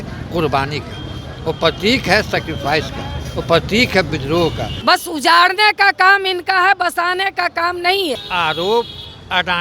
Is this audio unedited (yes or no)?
no